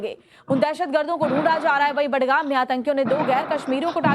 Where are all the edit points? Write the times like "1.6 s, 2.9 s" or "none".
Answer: 2.6 s

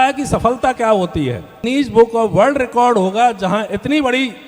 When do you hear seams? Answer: 1.5 s

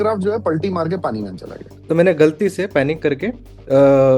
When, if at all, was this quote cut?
1.7 s

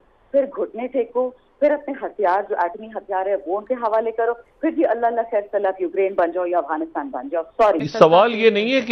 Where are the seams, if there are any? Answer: 7.9 s

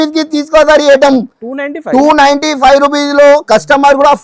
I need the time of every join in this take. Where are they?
none

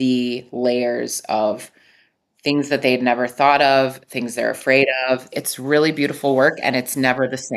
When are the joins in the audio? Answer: 5.5 s

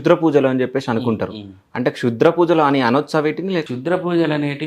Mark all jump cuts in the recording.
3.7 s

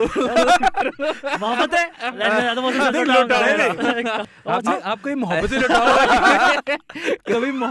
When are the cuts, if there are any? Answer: 4.2 s

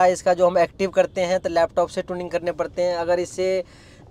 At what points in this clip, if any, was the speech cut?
none

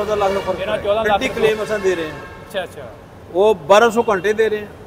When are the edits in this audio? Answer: 1.3 s

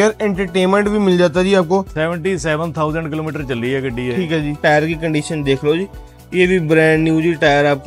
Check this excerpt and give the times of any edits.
1.9 s, 4.6 s

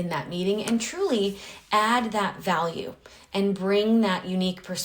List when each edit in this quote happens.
none

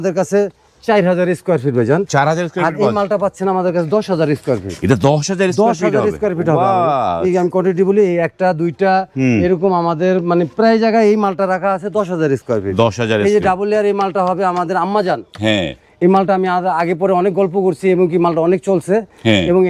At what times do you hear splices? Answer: none

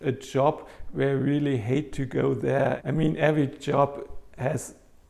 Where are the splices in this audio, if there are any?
2.8 s

